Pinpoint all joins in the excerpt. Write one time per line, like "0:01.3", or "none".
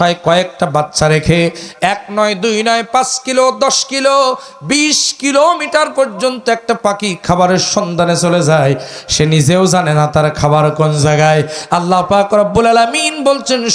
none